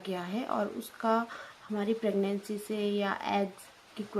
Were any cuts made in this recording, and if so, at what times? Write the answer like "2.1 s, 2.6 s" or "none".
none